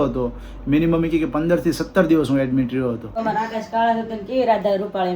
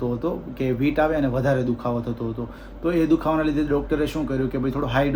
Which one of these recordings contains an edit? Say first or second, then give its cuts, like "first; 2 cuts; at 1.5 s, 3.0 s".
first; 1 cut; at 3.2 s